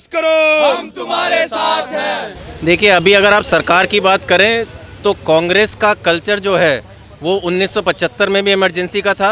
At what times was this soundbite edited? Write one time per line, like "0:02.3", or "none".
0:02.2